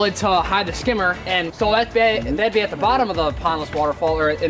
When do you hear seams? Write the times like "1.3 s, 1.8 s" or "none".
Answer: none

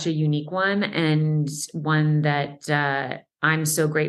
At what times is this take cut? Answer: none

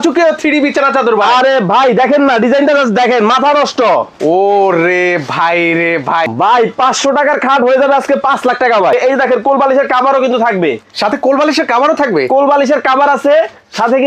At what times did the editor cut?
6.3 s, 8.9 s

